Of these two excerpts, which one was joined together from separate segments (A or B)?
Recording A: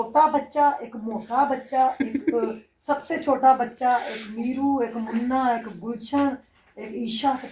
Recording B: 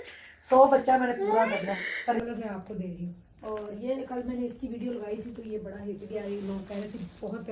B